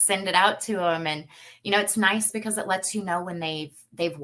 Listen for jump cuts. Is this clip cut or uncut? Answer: uncut